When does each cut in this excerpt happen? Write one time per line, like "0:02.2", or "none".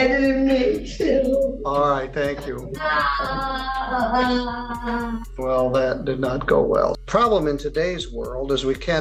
0:05.3
0:07.0